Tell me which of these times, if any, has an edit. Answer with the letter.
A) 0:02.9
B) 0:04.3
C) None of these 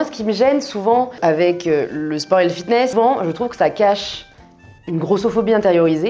A